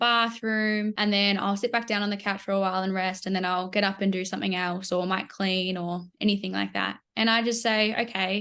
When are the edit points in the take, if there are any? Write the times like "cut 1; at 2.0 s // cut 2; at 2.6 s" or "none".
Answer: cut 1; at 1.0 s